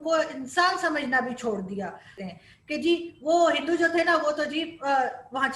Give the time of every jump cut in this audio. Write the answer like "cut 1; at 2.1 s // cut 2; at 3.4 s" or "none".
cut 1; at 2.1 s